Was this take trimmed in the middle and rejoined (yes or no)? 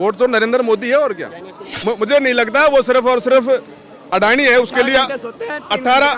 yes